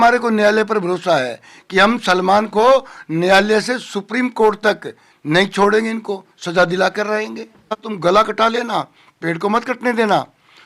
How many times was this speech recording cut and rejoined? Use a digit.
1